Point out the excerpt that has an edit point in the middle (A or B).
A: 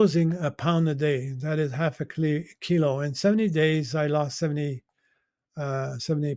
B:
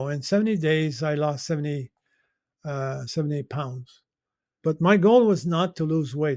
B